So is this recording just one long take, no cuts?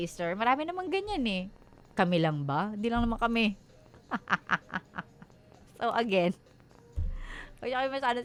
yes; 0 cuts

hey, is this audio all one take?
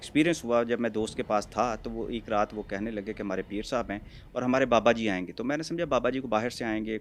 yes; 0 cuts

